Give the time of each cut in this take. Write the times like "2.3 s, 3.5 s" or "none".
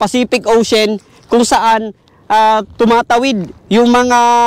none